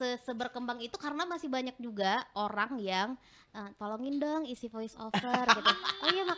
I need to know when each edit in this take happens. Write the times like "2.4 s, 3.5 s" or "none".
none